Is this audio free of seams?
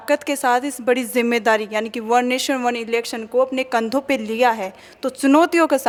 yes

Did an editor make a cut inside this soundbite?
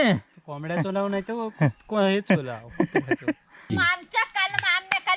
yes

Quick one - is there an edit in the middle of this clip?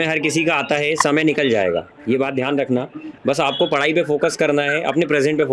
no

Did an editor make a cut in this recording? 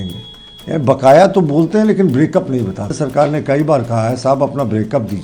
yes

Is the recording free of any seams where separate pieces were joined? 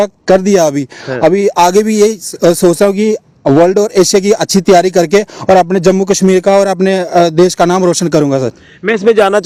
yes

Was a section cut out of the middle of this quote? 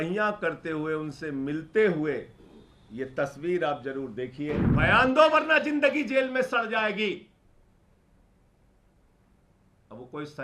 yes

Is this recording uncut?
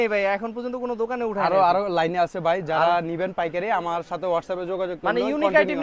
yes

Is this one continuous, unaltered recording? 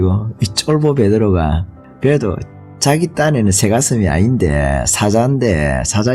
yes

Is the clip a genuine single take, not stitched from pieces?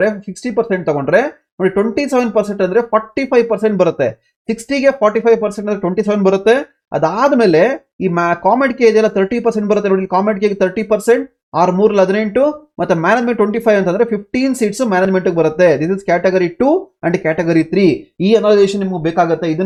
yes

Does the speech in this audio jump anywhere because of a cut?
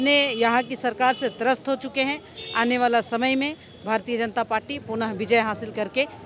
no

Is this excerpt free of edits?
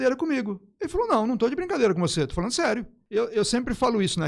no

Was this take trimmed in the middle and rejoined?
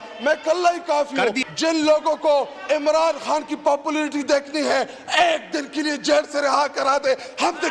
yes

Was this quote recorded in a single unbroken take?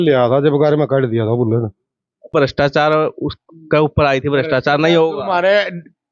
no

